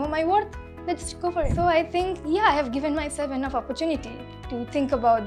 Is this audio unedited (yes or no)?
no